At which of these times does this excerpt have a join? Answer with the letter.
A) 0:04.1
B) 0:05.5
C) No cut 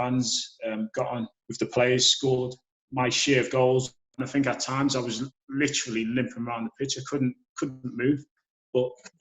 A